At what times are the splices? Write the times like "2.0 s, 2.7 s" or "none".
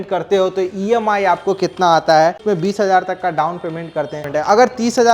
2.4 s, 4.2 s